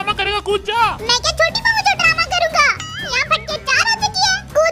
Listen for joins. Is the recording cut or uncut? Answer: uncut